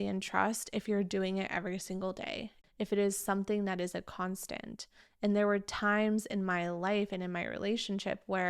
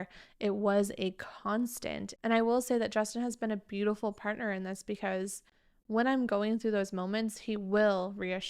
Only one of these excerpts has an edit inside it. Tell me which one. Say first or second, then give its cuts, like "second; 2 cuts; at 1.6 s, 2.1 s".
first; 1 cut; at 2.5 s